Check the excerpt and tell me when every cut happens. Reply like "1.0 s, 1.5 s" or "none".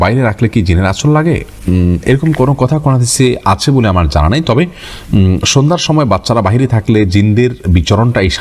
none